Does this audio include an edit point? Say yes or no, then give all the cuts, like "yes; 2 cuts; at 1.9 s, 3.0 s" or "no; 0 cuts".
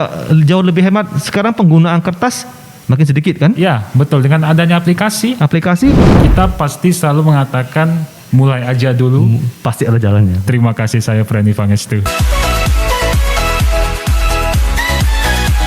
yes; 2 cuts; at 6.0 s, 12.1 s